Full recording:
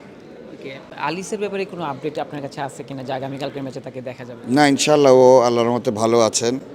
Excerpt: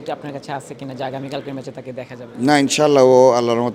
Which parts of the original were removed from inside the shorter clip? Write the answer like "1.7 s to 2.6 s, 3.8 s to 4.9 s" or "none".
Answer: none